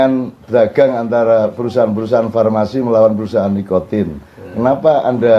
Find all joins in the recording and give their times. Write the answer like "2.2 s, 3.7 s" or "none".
none